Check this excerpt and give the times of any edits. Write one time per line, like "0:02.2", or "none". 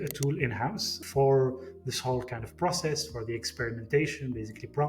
0:01.0